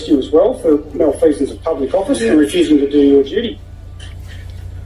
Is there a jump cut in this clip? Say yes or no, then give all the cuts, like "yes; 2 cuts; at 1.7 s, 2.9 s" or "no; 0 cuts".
no; 0 cuts